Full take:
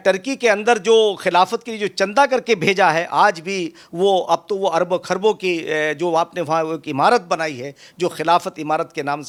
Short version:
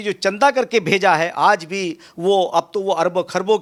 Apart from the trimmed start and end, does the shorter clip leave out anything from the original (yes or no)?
no